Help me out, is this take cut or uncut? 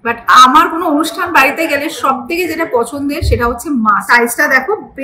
cut